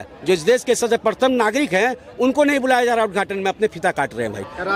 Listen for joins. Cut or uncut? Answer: uncut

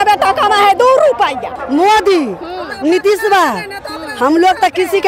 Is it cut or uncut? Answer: cut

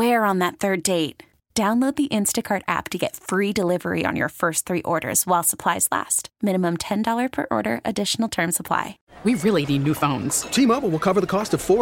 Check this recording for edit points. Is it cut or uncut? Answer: cut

